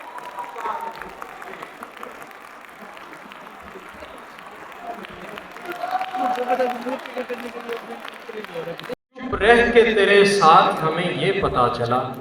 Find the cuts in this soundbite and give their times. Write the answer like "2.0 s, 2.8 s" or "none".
8.9 s

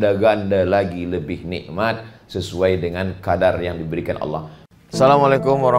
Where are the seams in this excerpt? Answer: 4.5 s

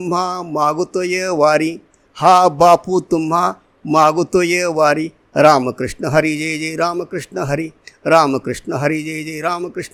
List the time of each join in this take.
none

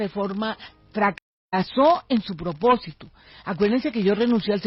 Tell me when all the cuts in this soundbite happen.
none

